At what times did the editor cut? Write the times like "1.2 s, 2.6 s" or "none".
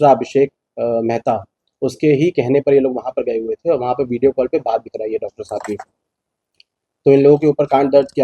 none